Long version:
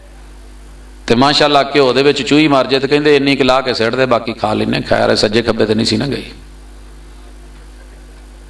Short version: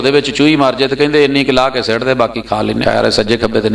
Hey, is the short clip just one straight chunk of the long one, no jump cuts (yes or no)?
no